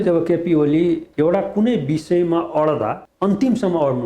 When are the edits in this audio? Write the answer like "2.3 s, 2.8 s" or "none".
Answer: 1.1 s, 3.1 s